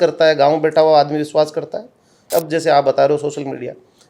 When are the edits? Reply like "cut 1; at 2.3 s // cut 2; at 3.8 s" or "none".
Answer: cut 1; at 2.2 s